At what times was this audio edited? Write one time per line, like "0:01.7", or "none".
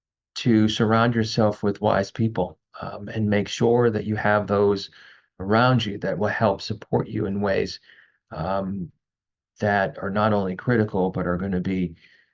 none

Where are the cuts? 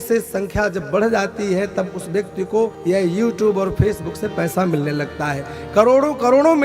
0:02.8

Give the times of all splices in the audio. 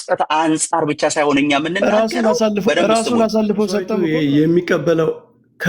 0:03.9

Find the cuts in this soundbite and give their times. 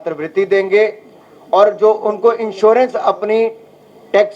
none

